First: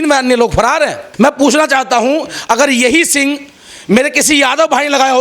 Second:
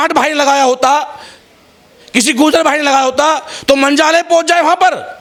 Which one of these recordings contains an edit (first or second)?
first